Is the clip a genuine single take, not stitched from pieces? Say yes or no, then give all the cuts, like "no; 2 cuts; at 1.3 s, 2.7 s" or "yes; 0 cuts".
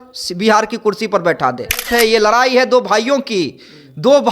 no; 1 cut; at 1.8 s